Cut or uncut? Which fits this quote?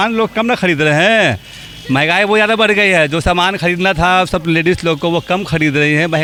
uncut